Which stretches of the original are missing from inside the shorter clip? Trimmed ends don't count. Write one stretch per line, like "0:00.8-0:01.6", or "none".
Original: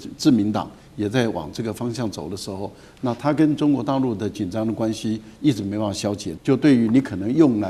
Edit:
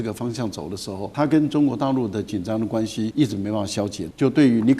0:02.7-0:03.2
0:05.2-0:05.4